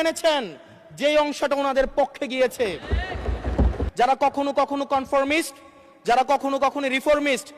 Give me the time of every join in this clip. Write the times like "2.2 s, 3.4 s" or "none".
3.8 s